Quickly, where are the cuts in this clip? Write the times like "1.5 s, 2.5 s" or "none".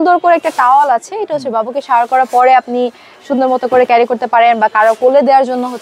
none